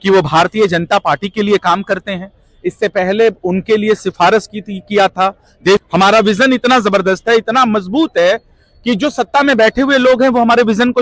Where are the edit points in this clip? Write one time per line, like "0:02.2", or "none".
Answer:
0:05.8